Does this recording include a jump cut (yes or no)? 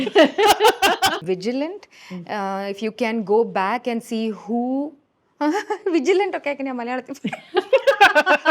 yes